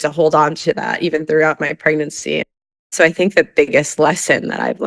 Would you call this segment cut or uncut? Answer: cut